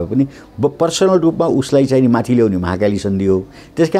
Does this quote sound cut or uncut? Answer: uncut